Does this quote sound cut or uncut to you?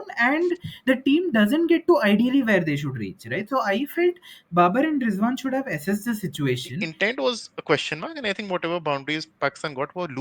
cut